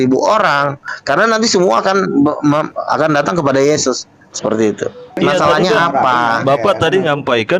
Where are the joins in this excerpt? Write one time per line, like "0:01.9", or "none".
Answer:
0:05.2